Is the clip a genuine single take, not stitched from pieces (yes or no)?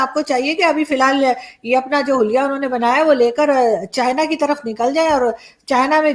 yes